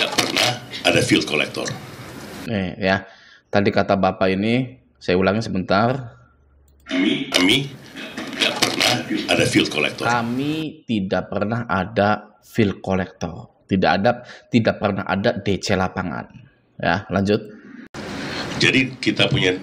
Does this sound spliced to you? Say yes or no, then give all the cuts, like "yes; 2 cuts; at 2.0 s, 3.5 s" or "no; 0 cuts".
yes; 1 cut; at 1.6 s